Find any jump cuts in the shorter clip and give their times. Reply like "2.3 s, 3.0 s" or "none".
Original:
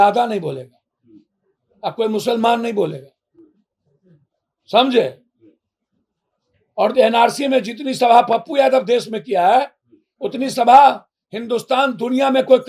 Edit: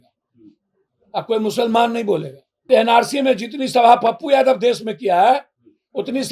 2.7 s